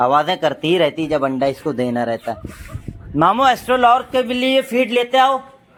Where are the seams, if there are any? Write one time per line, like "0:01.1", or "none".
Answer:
none